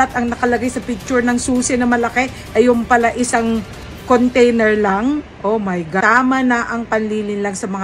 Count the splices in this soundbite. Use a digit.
1